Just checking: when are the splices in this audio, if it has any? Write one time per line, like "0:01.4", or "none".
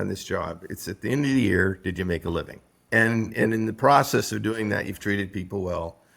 0:02.7